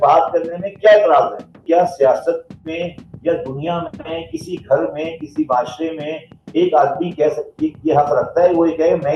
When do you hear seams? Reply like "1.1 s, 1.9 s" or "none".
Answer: 1.6 s

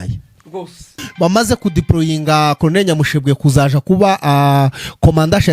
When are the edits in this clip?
1.0 s

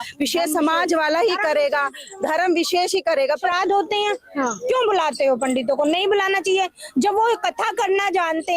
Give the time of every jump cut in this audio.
3.4 s

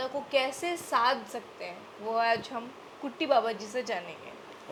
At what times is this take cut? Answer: none

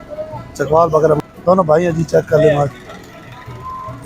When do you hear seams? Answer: 1.2 s

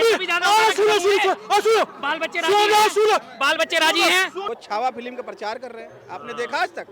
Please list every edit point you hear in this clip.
4.4 s

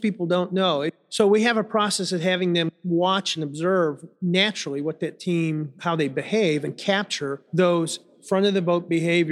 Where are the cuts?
1.0 s, 2.8 s, 4.1 s, 5.7 s, 7.3 s

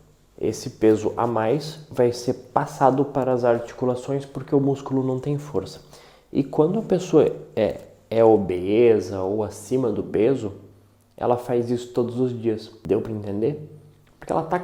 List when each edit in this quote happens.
none

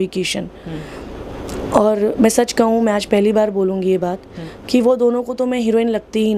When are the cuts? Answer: none

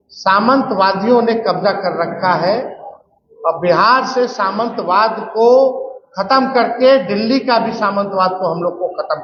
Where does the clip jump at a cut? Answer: none

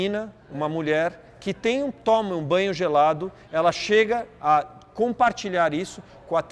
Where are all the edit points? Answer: none

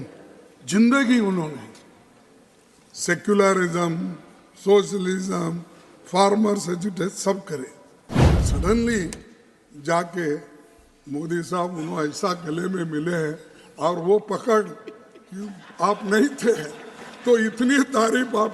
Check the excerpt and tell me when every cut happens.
8.2 s

